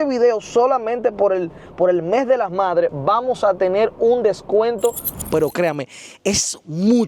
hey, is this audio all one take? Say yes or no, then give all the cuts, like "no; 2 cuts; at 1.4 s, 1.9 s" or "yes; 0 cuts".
no; 1 cut; at 5.3 s